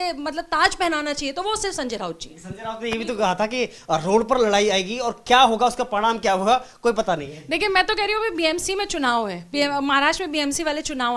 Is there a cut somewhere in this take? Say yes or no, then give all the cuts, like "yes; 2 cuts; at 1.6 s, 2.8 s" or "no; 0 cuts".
no; 0 cuts